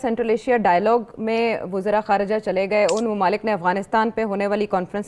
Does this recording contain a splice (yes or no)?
no